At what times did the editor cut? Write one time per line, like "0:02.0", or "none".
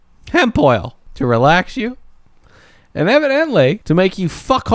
0:01.0
0:03.8